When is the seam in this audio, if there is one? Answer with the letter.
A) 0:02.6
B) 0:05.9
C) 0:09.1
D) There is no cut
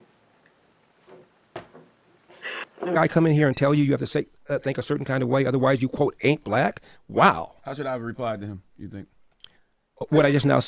A